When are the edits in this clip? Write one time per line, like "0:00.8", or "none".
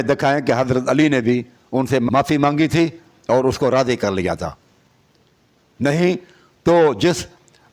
0:02.1